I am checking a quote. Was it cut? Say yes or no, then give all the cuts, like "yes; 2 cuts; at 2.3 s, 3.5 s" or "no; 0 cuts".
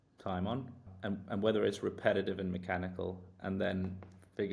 yes; 1 cut; at 0.9 s